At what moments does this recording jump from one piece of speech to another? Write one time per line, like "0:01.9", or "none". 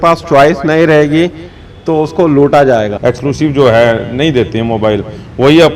0:02.9